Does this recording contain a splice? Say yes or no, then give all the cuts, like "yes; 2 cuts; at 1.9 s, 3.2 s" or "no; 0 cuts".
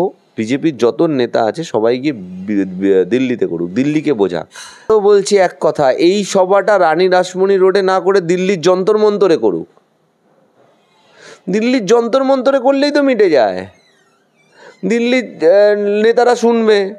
yes; 1 cut; at 4.9 s